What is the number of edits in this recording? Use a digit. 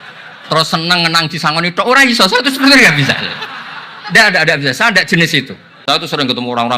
1